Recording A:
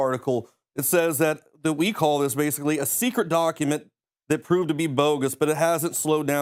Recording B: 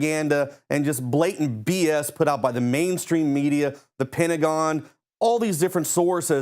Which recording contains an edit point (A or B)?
B